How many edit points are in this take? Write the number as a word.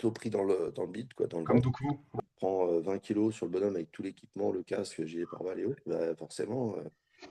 one